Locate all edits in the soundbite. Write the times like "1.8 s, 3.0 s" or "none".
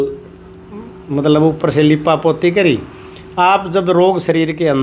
none